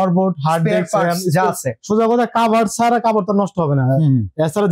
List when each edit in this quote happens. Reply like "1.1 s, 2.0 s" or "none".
none